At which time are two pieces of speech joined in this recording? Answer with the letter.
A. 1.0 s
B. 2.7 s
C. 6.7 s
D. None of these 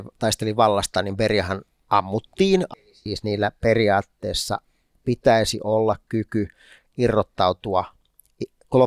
B